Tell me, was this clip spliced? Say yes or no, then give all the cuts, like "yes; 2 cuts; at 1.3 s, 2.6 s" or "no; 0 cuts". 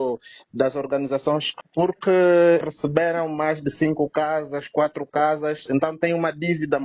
yes; 2 cuts; at 1.5 s, 2.6 s